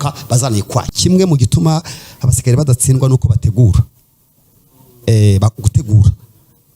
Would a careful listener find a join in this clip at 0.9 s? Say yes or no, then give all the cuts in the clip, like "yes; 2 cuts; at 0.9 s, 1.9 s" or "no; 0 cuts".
yes; 1 cut; at 0.9 s